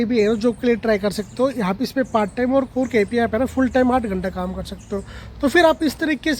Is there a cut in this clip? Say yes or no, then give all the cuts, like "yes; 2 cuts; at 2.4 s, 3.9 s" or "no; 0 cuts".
no; 0 cuts